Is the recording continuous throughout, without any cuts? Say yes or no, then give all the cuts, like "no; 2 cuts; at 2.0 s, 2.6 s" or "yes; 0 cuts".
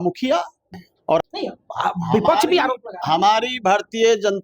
no; 1 cut; at 1.2 s